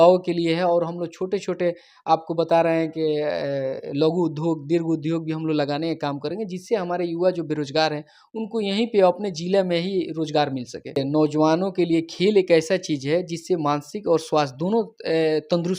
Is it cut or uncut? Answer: cut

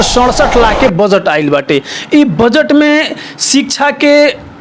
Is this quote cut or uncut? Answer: uncut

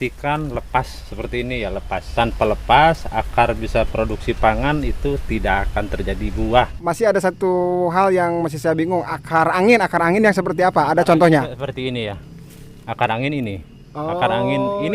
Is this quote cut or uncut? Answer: cut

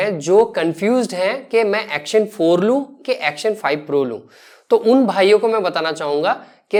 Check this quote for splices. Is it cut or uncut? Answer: uncut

